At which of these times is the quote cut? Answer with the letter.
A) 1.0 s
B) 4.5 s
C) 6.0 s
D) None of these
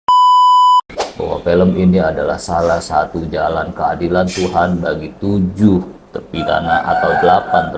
A